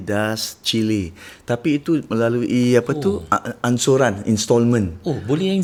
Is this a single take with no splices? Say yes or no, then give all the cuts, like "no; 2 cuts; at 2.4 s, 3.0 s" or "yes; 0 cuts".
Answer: yes; 0 cuts